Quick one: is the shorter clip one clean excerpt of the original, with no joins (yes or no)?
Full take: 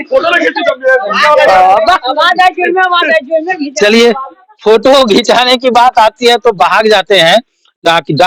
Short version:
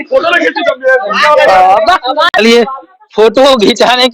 no